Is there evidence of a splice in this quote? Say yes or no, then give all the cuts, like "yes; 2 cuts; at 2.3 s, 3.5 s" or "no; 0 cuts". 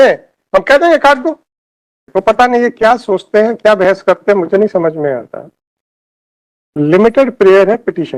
yes; 1 cut; at 2.0 s